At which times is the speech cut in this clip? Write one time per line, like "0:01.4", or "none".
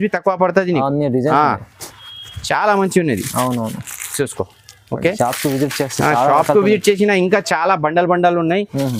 none